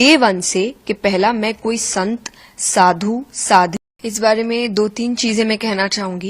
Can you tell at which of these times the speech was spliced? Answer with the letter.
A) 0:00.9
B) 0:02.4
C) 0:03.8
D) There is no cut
C